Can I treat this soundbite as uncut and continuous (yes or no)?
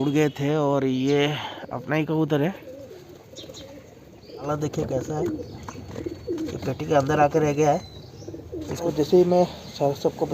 no